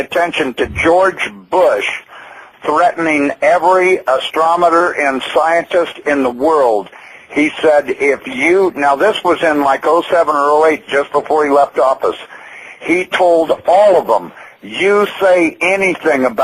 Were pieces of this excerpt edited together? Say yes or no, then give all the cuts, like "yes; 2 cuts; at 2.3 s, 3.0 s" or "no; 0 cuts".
yes; 1 cut; at 6.6 s